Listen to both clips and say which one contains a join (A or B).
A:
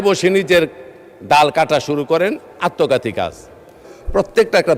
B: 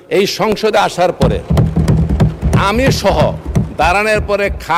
A